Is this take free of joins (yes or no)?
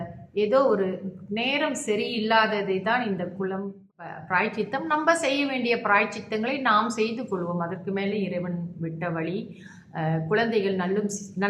no